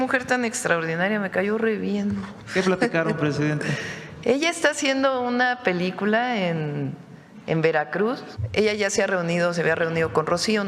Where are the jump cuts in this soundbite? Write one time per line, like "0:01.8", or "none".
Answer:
0:02.3
0:08.3